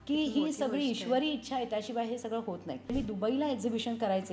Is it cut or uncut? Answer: cut